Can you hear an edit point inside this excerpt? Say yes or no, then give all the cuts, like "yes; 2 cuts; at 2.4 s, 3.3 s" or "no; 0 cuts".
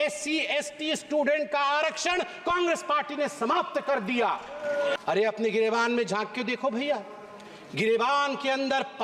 yes; 1 cut; at 4.9 s